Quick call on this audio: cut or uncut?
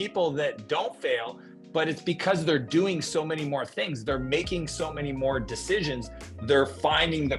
uncut